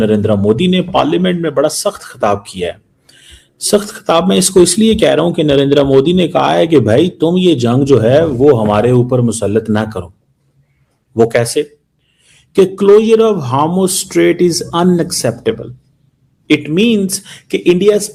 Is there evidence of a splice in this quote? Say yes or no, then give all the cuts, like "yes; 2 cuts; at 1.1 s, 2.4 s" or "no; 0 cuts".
no; 0 cuts